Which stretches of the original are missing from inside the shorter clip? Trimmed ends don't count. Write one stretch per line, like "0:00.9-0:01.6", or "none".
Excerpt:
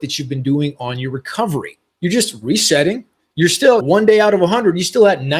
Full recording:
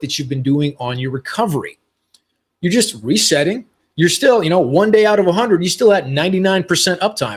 0:01.8-0:02.4
0:04.4-0:04.7